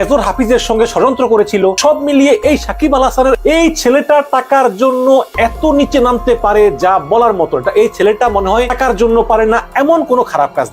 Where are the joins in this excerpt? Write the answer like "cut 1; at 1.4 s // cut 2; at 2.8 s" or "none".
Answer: cut 1; at 1.8 s // cut 2; at 8.7 s